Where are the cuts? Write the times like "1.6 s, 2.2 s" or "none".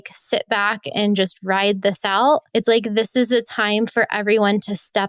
2.5 s